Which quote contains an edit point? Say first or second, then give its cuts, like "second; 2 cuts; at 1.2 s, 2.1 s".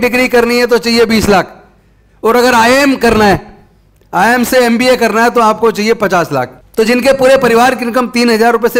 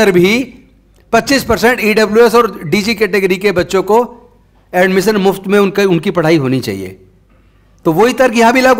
first; 1 cut; at 6.6 s